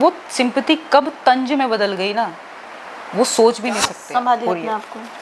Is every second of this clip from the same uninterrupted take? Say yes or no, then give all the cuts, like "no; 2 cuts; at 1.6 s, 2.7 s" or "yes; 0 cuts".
no; 1 cut; at 4.0 s